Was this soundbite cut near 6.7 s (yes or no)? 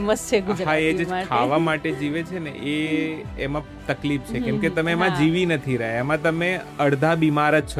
yes